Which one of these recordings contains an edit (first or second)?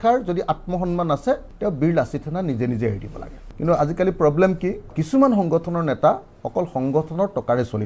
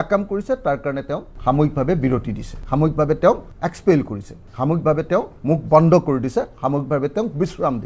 first